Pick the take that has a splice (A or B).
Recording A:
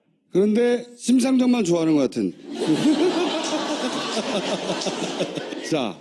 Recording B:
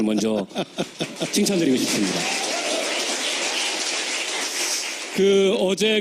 B